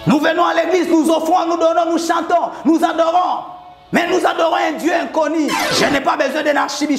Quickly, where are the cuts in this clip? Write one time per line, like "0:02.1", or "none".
0:05.6

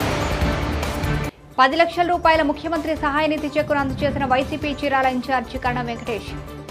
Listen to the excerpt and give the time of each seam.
0:01.0

